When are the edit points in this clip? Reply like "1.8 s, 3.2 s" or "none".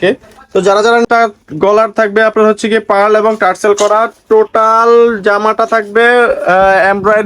1.1 s